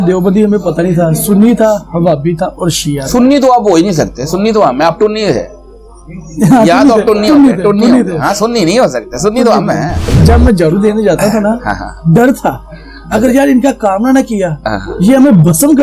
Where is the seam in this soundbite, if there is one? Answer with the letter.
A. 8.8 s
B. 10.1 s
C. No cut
B